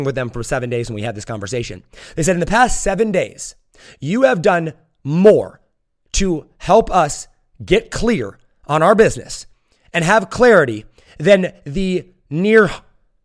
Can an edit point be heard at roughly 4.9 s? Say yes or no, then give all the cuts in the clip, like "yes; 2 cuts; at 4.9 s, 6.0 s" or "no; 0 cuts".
no; 0 cuts